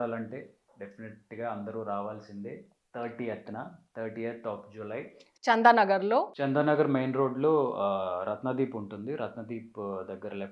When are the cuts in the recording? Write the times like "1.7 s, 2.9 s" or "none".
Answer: none